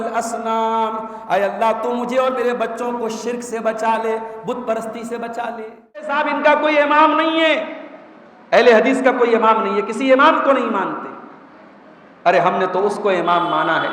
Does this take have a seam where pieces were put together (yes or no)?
yes